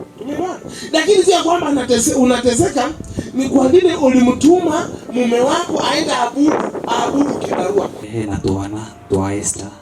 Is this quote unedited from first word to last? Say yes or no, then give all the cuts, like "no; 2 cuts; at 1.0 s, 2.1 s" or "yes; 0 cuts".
no; 1 cut; at 8.1 s